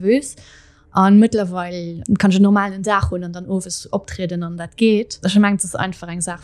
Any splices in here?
yes; 2 cuts; at 2.1 s, 5.1 s

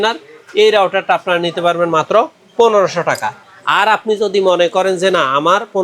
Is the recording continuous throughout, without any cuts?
yes; 0 cuts

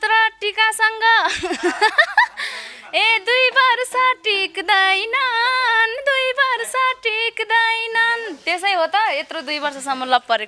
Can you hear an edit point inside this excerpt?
no; 0 cuts

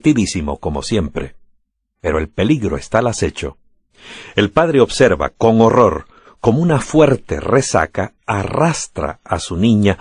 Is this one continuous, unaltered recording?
no; 1 cut; at 6.8 s

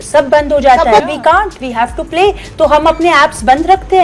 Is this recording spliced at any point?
yes; 1 cut; at 1.0 s

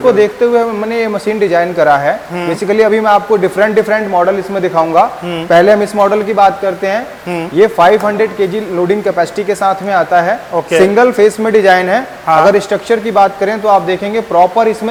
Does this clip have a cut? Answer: no; 0 cuts

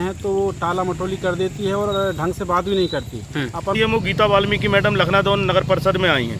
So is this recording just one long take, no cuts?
no; 1 cut; at 3.7 s

